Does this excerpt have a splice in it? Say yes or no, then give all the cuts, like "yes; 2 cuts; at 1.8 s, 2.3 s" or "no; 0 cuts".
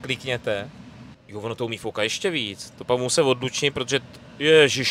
yes; 1 cut; at 1.2 s